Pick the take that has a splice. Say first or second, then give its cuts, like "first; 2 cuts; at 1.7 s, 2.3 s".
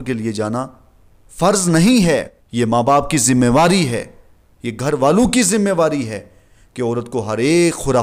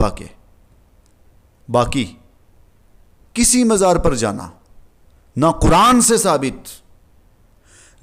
first; 1 cut; at 2.6 s